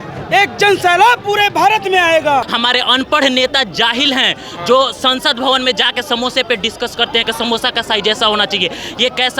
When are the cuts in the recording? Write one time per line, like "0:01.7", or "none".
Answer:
0:02.5